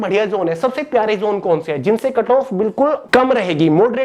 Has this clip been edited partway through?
no; 0 cuts

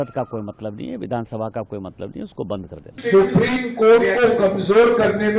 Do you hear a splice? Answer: yes; 1 cut; at 2.9 s

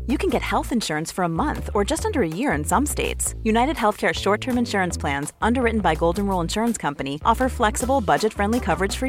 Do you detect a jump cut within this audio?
no; 0 cuts

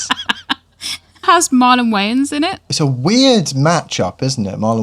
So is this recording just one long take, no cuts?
no; 2 cuts; at 1.2 s, 2.6 s

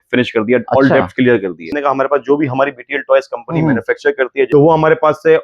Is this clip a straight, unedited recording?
no; 2 cuts; at 1.7 s, 4.5 s

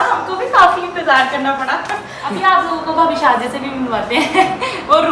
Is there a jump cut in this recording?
yes; 1 cut; at 2.1 s

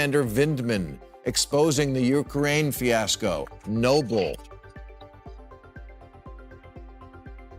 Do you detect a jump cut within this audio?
yes; 1 cut; at 4.4 s

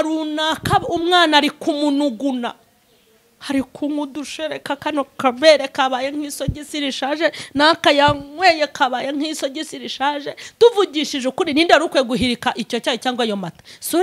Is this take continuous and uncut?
yes; 0 cuts

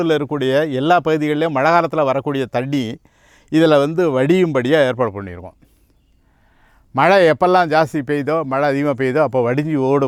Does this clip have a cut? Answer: no; 0 cuts

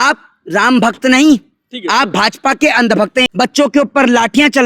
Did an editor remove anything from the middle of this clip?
yes; 1 cut; at 3.2 s

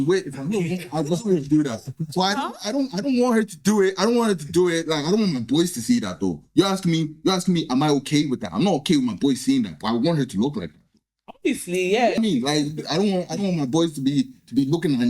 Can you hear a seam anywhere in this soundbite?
yes; 1 cut; at 12.2 s

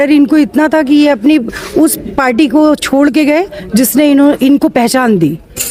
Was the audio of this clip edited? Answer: no; 0 cuts

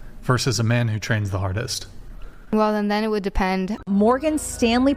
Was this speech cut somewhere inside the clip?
yes; 1 cut; at 3.8 s

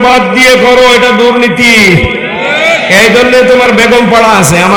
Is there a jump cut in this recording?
no; 0 cuts

